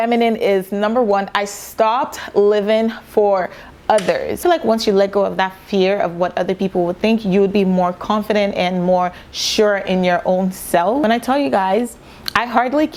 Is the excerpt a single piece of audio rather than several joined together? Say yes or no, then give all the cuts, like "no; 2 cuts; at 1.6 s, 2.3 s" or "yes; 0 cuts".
yes; 0 cuts